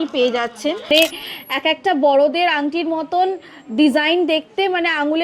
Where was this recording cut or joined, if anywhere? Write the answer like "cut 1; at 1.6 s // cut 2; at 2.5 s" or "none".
cut 1; at 0.9 s